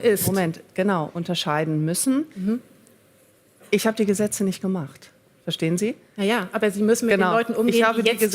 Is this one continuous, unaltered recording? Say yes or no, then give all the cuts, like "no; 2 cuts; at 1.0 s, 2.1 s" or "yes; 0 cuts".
yes; 0 cuts